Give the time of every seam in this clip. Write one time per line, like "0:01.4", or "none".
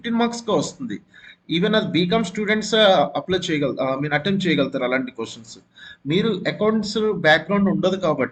none